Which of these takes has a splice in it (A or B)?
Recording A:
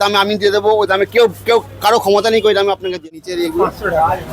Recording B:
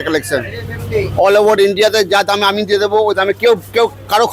A